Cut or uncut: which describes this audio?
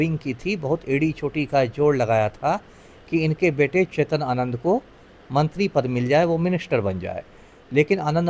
uncut